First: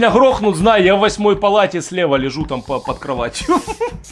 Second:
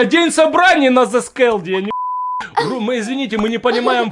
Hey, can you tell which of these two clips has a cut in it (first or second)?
second